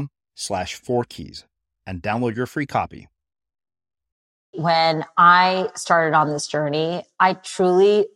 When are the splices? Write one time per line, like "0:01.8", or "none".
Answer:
0:04.5